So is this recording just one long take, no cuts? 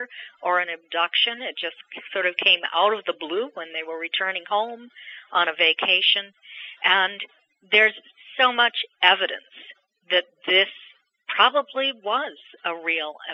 yes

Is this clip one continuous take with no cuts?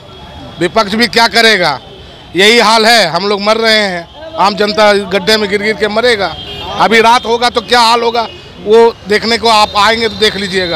yes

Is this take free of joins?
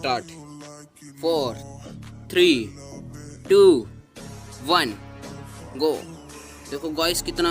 yes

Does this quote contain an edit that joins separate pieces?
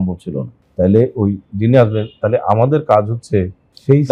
no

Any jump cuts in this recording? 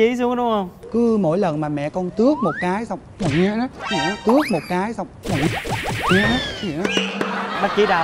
no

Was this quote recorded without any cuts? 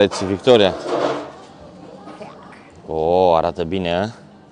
yes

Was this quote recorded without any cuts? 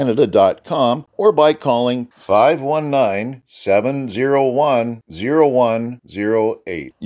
no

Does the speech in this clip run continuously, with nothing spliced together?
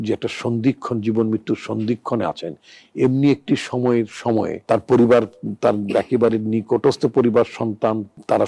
yes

